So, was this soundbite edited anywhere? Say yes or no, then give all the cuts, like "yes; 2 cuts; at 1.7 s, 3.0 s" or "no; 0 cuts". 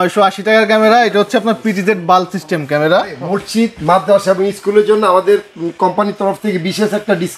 yes; 1 cut; at 3.1 s